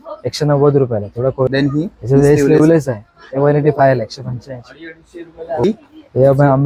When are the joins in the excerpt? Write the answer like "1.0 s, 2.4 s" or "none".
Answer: 1.5 s, 5.6 s